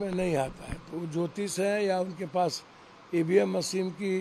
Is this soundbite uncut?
yes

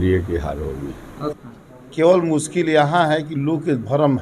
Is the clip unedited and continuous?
no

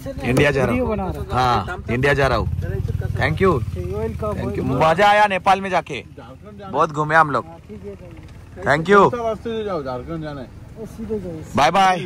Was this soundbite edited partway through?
no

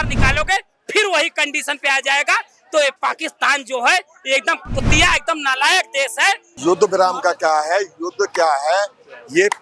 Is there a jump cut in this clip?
yes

